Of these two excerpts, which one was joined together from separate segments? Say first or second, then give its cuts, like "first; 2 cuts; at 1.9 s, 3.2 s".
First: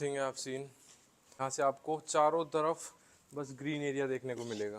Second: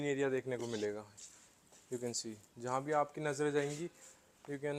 first; 1 cut; at 1.4 s